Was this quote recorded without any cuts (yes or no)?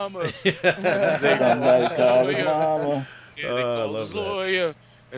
yes